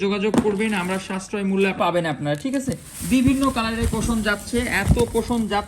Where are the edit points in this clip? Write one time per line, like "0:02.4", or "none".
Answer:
0:01.8